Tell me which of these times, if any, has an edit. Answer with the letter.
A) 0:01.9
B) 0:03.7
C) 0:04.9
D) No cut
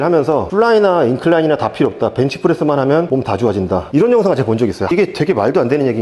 C